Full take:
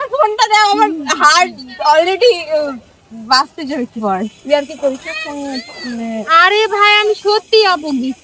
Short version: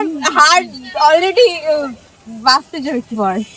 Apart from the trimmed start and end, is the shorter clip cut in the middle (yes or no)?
no